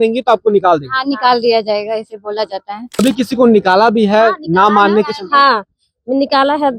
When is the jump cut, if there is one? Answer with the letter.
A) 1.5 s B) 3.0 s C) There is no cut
B